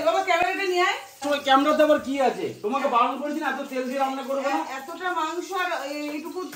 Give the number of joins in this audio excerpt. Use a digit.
1